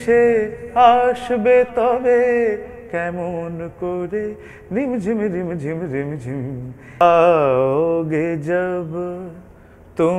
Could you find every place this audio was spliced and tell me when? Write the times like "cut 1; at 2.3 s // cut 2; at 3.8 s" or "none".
cut 1; at 7.0 s

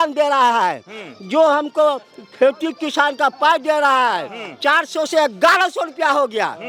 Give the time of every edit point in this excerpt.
none

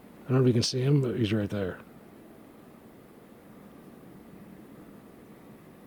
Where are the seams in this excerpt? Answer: none

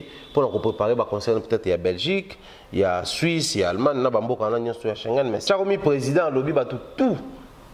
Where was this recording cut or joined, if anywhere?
cut 1; at 5.4 s

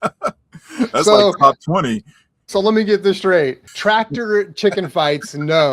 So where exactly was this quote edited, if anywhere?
cut 1; at 3.7 s

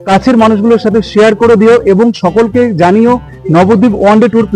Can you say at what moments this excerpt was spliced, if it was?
none

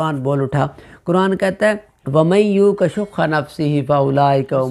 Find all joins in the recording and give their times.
cut 1; at 1.9 s

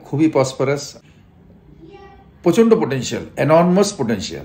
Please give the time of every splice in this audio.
cut 1; at 0.9 s

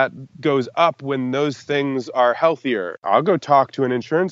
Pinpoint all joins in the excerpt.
cut 1; at 3.0 s

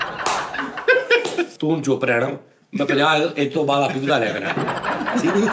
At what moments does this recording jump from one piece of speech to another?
cut 1; at 1.5 s

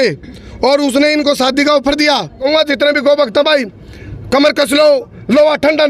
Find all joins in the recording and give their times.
cut 1; at 2.4 s

